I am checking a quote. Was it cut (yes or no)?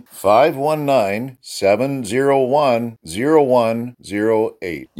no